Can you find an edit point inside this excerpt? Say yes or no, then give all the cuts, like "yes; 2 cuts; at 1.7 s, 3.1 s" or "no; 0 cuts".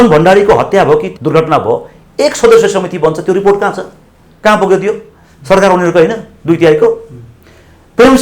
yes; 1 cut; at 1.1 s